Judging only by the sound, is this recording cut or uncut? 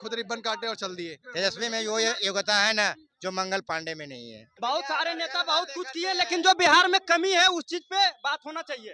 cut